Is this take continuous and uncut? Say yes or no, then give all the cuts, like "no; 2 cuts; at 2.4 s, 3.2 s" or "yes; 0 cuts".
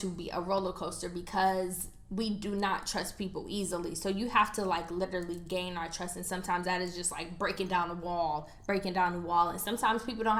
yes; 0 cuts